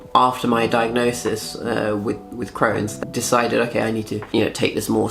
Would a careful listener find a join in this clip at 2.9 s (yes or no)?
yes